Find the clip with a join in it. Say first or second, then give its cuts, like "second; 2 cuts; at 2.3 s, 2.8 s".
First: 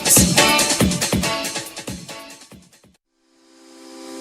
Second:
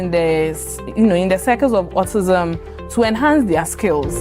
first; 1 cut; at 3.2 s